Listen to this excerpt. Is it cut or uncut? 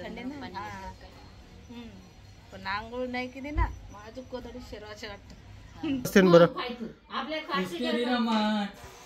cut